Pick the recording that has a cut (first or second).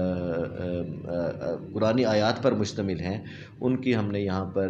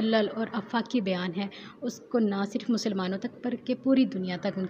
first